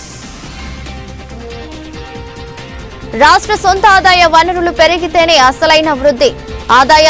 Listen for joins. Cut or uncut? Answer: cut